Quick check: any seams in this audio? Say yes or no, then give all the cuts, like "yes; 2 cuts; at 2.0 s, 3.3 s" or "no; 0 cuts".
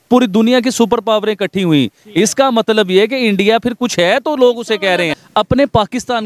yes; 1 cut; at 5.2 s